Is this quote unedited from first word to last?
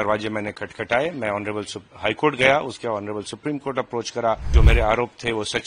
no; 1 cut; at 4.5 s

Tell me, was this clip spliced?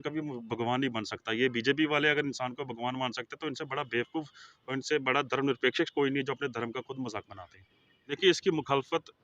yes; 1 cut; at 8.2 s

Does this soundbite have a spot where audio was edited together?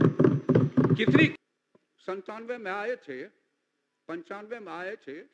yes; 1 cut; at 1.3 s

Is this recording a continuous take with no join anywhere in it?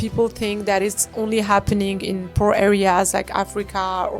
yes; 0 cuts

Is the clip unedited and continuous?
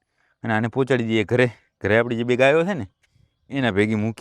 yes; 0 cuts

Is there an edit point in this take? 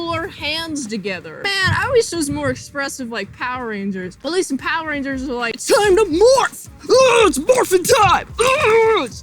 yes; 2 cuts; at 1.4 s, 5.6 s

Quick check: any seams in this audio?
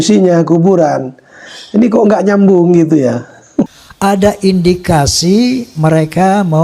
yes; 1 cut; at 3.8 s

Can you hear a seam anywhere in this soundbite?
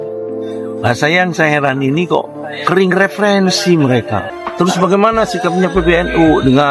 yes; 1 cut; at 4.4 s

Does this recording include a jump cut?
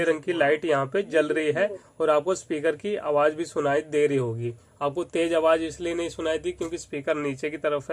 no; 0 cuts

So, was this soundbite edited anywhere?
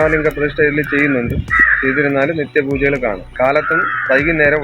yes; 1 cut; at 3.3 s

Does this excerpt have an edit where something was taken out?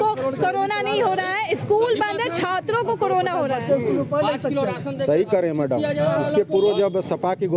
no; 0 cuts

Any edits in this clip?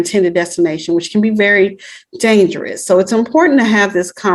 no; 0 cuts

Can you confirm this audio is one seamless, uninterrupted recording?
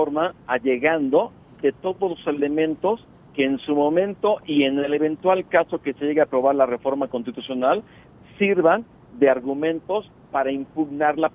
yes; 0 cuts

